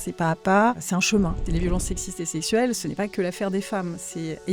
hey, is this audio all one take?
no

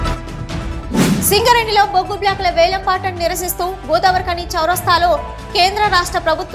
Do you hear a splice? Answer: yes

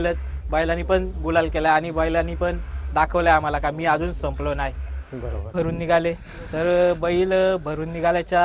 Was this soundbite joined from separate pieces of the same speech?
yes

